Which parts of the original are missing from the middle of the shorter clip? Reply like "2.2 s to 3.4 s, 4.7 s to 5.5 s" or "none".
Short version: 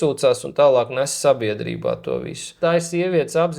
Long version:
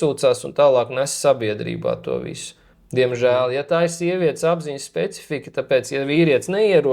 2.6 s to 3.6 s